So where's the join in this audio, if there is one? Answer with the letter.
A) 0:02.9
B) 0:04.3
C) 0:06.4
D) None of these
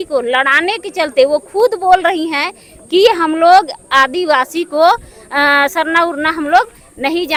D